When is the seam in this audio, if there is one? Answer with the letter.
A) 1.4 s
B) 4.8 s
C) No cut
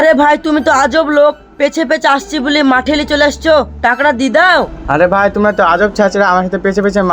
B